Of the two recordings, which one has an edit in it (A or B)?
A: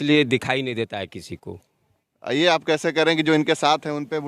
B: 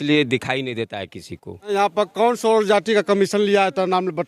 B